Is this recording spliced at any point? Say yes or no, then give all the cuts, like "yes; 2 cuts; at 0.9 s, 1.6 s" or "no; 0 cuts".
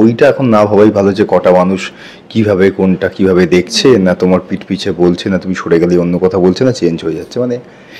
no; 0 cuts